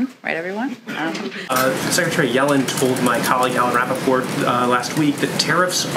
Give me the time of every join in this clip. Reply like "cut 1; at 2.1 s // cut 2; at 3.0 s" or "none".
cut 1; at 1.5 s